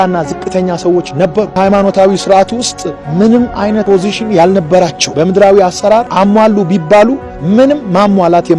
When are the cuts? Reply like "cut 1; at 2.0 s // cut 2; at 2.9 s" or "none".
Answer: cut 1; at 1.6 s // cut 2; at 3.8 s // cut 3; at 5.0 s // cut 4; at 6.1 s